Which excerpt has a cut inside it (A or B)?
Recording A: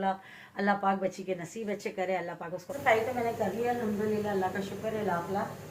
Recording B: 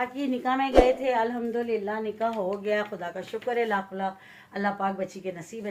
A